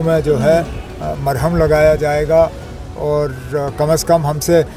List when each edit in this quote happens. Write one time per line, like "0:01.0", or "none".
none